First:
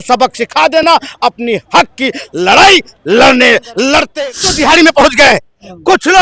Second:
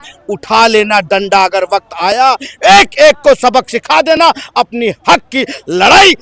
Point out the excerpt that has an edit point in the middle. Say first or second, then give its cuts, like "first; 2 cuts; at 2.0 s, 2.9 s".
first; 1 cut; at 4.2 s